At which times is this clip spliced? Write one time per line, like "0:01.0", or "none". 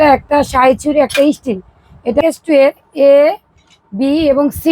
0:02.2